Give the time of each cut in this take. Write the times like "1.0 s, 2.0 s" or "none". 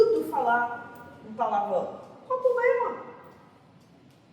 2.9 s